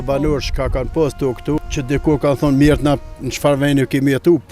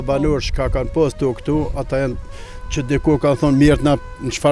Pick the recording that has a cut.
first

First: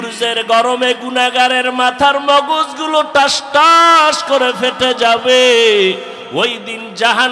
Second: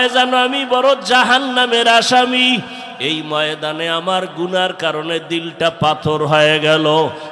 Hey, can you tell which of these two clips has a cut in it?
first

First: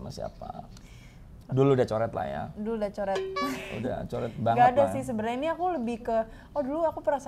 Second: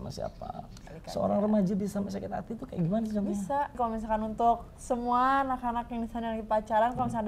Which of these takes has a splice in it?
second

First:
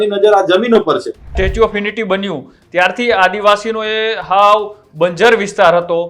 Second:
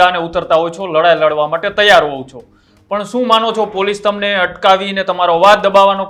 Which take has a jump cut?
first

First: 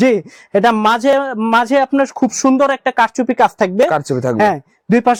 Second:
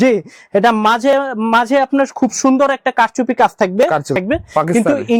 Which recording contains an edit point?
second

